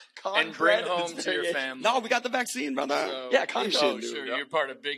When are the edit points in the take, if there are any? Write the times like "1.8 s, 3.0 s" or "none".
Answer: 3.7 s